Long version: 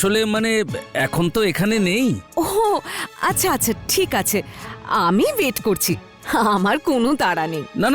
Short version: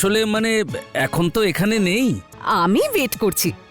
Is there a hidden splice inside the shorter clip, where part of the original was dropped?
yes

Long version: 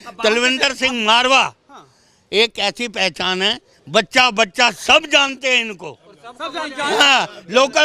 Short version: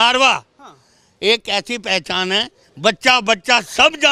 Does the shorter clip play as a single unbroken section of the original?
yes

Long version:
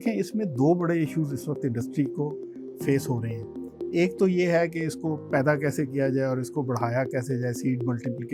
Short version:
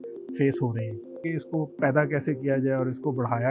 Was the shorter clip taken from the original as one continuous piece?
no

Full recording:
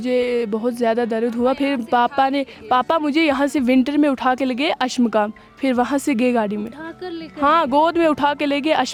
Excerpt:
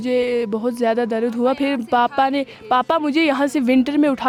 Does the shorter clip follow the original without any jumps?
yes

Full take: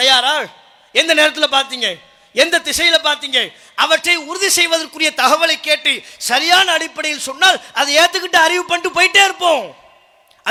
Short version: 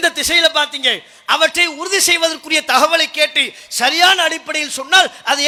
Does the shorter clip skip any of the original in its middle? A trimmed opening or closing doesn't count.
no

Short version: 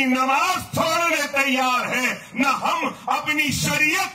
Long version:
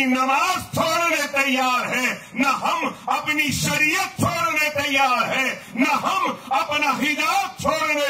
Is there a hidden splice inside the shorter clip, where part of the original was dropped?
no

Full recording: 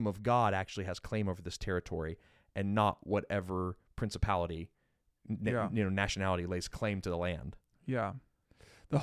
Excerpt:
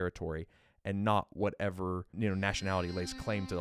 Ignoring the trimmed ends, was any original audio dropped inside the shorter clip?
yes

